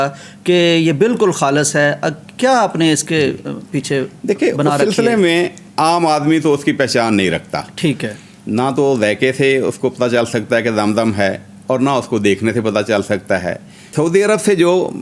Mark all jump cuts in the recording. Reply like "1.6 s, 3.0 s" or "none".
none